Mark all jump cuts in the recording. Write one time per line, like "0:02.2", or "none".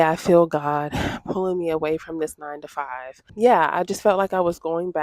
0:03.2